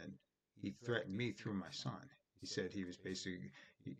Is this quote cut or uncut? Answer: uncut